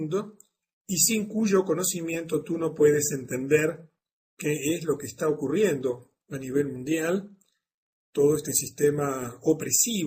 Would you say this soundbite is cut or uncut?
uncut